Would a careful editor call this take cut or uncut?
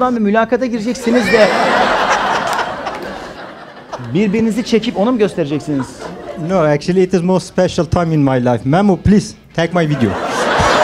uncut